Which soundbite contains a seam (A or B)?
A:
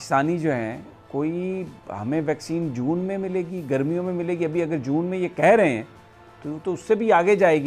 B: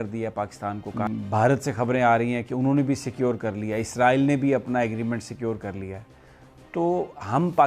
B